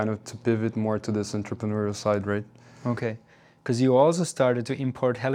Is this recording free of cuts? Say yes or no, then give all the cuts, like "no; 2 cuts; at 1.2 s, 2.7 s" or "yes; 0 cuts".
yes; 0 cuts